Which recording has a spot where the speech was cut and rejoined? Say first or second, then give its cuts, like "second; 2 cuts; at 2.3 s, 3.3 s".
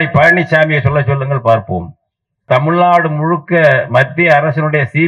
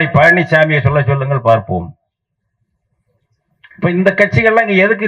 first; 1 cut; at 2.4 s